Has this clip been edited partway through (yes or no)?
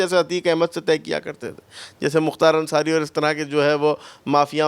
no